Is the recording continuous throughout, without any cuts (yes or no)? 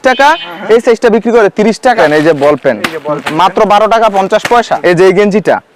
no